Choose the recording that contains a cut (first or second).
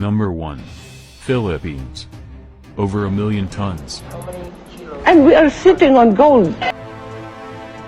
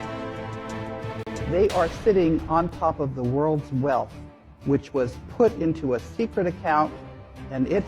second